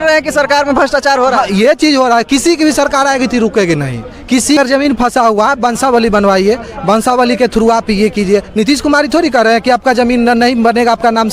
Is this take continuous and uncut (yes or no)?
no